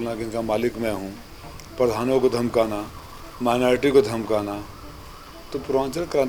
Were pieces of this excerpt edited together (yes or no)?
no